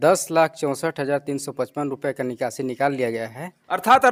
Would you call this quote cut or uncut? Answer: uncut